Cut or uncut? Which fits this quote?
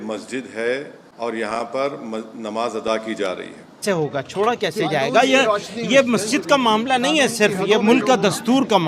cut